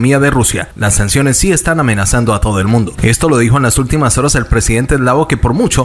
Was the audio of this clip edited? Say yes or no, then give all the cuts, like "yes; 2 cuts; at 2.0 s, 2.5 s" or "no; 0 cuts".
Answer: no; 0 cuts